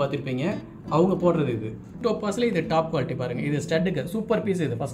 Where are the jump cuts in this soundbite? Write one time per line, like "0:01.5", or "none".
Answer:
0:02.0